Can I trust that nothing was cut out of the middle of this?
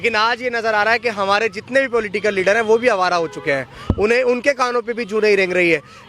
yes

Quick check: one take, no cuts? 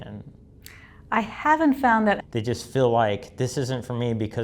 no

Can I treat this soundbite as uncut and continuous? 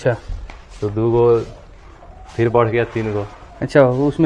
yes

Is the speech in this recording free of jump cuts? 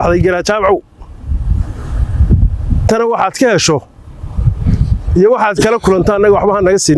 yes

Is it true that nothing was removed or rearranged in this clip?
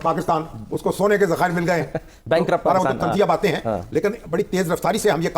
yes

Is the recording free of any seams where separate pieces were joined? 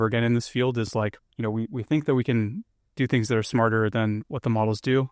no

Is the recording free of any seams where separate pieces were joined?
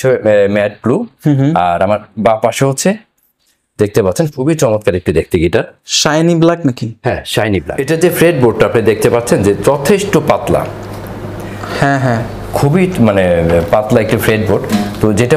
no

